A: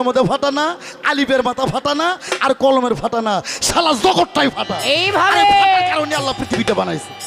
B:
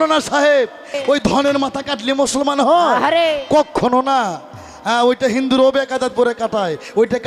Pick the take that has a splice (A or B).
B